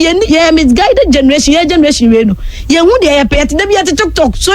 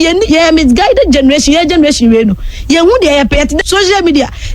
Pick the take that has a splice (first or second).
second